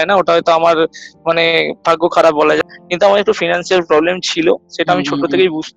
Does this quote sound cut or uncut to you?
cut